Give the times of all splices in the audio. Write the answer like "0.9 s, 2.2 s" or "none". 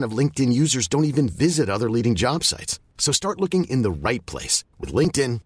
none